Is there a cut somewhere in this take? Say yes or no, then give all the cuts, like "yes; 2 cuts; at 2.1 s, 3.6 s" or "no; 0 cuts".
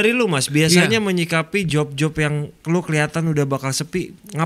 no; 0 cuts